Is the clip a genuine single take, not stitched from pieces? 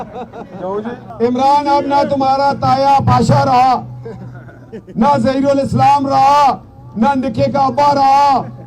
no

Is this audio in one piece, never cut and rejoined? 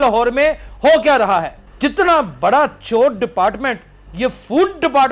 no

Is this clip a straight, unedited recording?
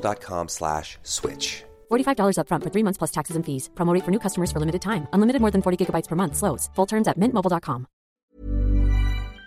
no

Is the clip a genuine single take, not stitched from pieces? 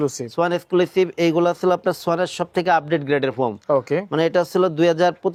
yes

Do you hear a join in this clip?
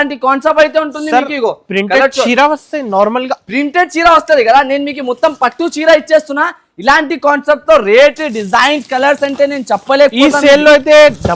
no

